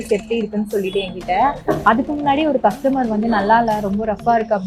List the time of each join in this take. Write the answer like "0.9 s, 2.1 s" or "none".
none